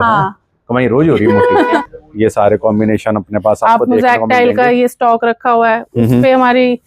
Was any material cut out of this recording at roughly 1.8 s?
yes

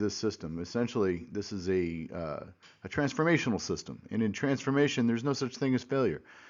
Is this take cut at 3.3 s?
no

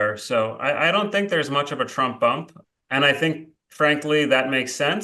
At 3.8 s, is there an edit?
no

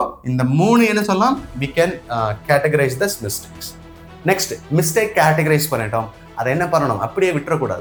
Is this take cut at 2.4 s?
no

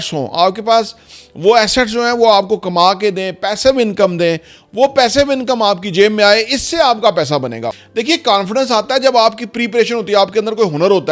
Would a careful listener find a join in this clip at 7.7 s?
yes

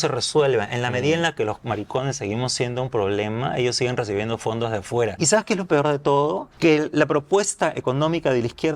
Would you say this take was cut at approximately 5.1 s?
yes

